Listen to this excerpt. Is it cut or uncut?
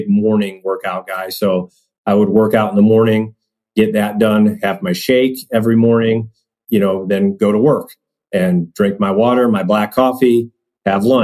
uncut